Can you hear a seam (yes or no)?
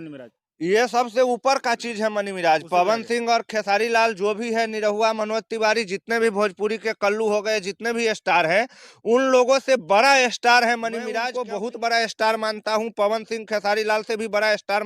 yes